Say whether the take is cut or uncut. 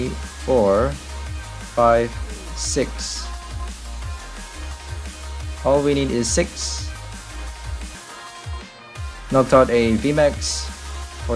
cut